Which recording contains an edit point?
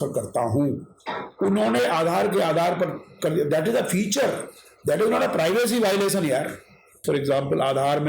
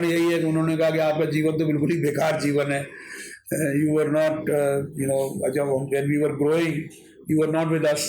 first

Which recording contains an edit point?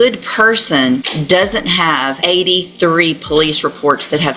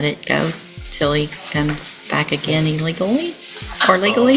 first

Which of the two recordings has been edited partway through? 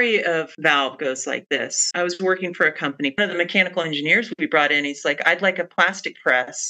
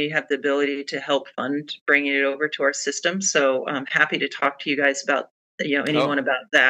first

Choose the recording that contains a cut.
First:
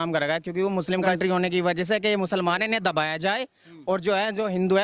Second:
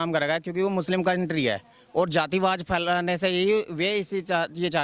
first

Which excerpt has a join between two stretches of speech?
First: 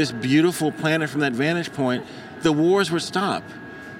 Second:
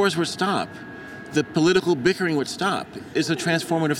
second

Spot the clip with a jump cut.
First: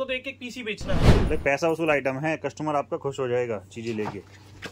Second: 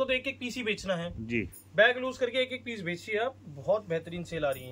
first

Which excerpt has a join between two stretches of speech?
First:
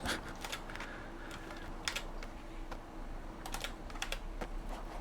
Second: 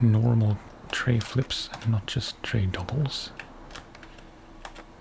first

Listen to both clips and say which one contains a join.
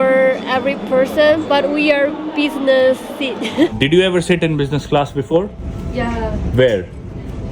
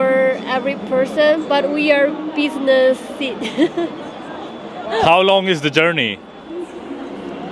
first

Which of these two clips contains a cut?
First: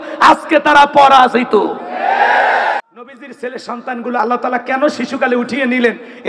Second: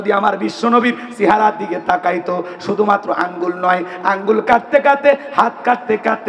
first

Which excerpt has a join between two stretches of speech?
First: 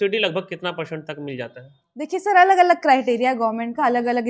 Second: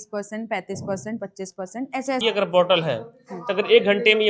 second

